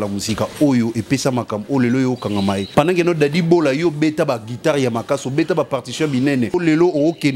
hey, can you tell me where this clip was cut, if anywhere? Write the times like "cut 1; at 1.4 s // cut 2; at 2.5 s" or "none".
cut 1; at 2.6 s // cut 2; at 6.5 s